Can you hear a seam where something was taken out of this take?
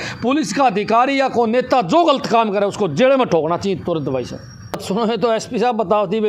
yes; 1 cut; at 4.8 s

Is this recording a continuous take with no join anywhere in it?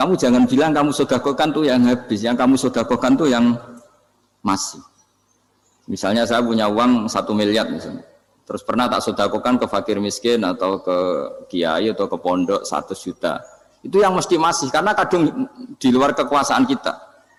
yes; 0 cuts

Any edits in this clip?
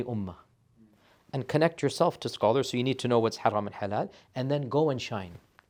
no; 0 cuts

